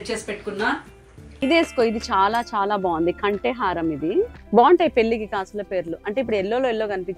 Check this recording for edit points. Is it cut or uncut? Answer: cut